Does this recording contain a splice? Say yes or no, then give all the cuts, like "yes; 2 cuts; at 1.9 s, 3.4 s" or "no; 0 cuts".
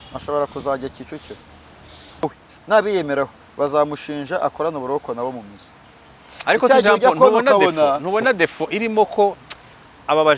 yes; 1 cut; at 2.2 s